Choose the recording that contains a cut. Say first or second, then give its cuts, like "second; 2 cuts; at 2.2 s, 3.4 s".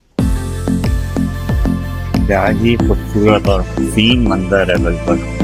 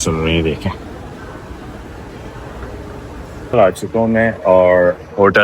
second; 1 cut; at 3.5 s